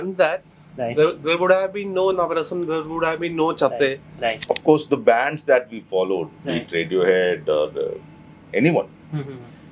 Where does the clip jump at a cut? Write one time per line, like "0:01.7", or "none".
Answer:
0:04.4

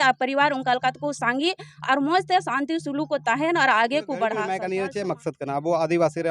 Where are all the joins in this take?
0:04.5

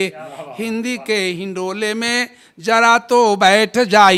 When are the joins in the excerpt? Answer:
none

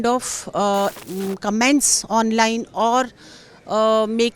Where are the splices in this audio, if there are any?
0:01.1

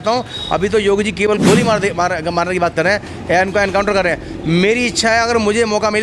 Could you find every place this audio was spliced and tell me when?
none

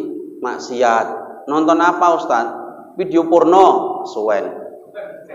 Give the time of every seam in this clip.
none

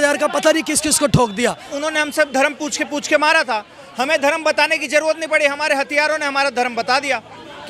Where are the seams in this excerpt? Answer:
0:01.7

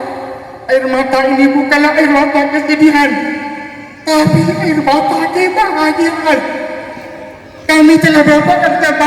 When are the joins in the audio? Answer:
none

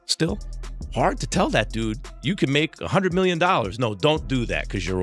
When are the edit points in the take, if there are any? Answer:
none

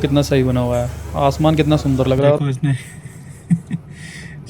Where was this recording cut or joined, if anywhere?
0:02.4

